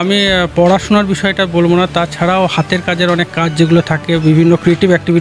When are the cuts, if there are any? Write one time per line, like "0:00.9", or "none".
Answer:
none